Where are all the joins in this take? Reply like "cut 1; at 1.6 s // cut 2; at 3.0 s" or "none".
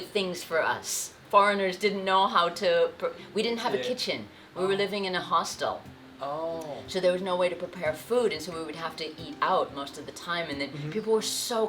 cut 1; at 1.2 s